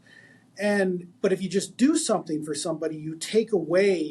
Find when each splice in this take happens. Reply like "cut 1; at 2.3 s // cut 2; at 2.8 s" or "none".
cut 1; at 1.1 s